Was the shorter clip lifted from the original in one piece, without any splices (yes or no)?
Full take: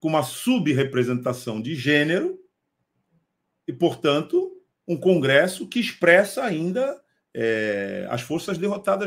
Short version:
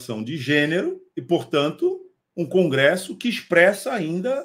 no